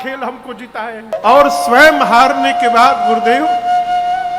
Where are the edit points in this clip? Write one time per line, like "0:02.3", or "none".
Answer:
0:01.1